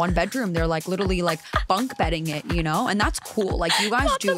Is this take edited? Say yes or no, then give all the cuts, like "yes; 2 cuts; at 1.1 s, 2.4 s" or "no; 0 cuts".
no; 0 cuts